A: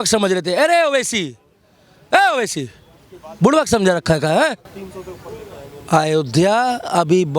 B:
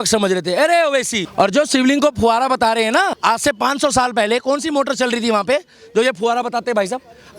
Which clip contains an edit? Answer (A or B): B